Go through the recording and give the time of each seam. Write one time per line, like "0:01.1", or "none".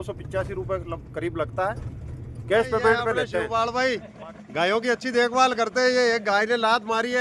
0:03.4